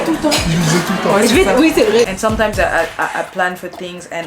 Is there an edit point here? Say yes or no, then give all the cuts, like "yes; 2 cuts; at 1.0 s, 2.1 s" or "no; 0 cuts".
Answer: yes; 1 cut; at 2.1 s